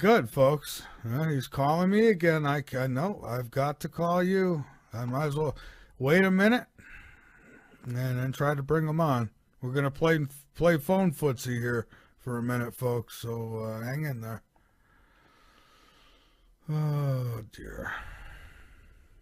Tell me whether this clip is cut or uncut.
cut